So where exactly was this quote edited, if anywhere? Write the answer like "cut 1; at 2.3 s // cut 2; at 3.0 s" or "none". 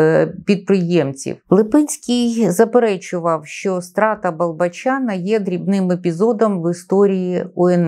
cut 1; at 1.3 s